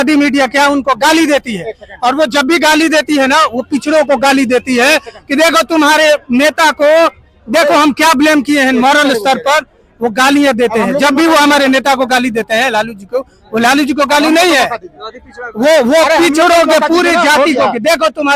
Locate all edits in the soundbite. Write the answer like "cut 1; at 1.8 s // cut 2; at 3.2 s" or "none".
none